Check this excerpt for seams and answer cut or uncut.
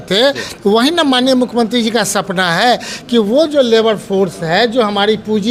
uncut